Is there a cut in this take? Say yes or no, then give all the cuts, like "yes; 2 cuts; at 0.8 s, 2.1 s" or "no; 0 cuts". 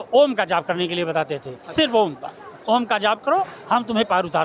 no; 0 cuts